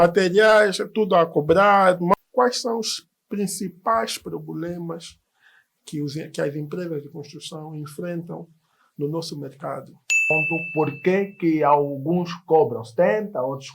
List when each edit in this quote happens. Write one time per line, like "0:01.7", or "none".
0:02.1
0:10.3